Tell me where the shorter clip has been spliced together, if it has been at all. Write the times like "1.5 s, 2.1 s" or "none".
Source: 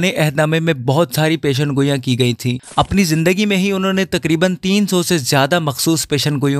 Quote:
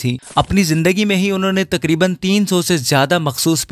none